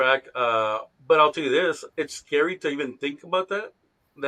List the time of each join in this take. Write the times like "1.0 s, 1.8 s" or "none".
1.9 s